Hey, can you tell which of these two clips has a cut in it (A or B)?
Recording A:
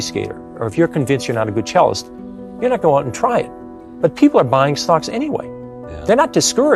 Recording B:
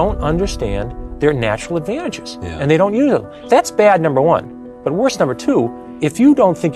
B